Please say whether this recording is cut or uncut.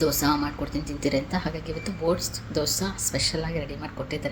uncut